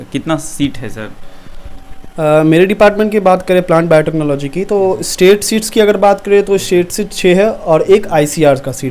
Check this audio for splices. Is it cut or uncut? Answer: uncut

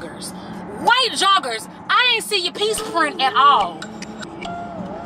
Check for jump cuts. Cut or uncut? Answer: uncut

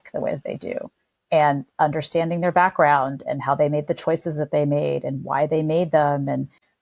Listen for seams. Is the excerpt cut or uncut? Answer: uncut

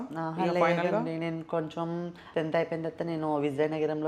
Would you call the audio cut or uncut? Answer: cut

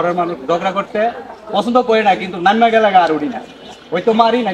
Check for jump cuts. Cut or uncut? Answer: uncut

